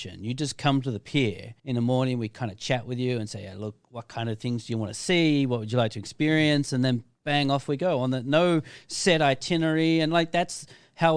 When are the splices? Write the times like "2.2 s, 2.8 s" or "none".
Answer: 1.5 s